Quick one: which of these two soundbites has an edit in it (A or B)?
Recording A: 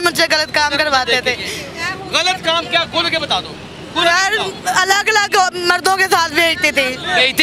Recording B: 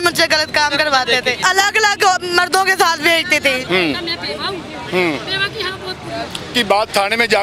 B